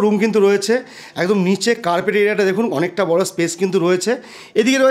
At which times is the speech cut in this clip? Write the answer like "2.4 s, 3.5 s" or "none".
none